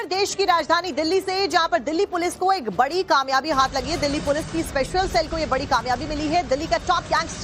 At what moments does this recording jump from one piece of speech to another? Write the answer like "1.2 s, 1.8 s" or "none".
3.1 s